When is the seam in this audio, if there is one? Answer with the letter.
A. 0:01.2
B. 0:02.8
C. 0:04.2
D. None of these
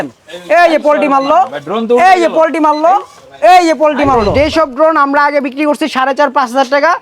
C